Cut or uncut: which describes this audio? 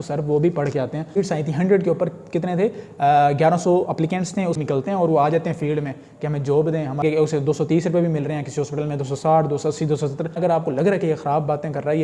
cut